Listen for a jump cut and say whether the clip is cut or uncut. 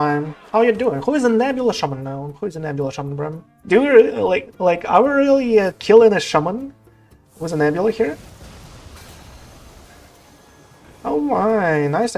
cut